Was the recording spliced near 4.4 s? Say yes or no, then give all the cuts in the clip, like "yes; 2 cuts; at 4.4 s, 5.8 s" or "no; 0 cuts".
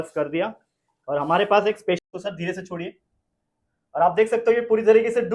no; 1 cut; at 2.0 s